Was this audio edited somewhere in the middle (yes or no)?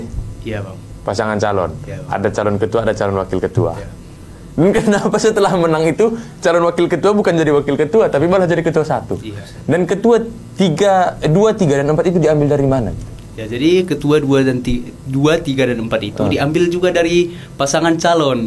no